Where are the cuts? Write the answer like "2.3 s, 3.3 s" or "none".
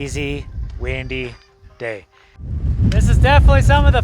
2.6 s